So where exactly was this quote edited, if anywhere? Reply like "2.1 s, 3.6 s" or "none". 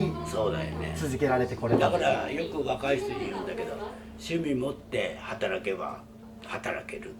none